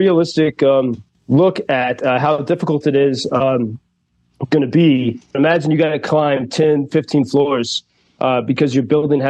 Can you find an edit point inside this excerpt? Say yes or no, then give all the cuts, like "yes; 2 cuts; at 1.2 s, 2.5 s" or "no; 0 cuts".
yes; 2 cuts; at 1.1 s, 5.3 s